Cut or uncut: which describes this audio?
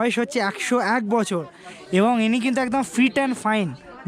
uncut